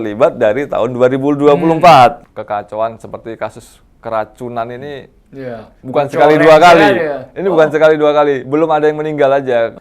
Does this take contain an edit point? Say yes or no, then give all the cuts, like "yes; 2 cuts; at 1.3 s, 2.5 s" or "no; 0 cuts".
yes; 1 cut; at 2.3 s